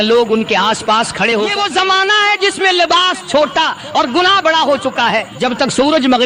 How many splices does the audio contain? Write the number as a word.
two